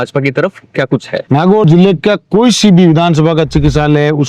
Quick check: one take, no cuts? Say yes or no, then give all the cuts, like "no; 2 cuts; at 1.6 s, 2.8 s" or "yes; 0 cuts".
no; 1 cut; at 1.6 s